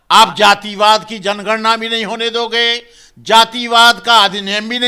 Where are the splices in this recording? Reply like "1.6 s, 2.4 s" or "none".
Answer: none